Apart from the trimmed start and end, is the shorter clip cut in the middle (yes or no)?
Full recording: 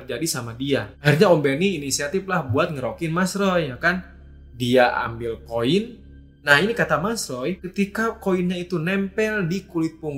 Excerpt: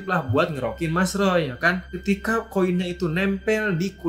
yes